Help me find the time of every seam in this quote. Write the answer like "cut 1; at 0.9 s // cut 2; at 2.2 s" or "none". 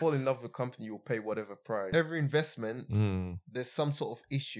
cut 1; at 1.9 s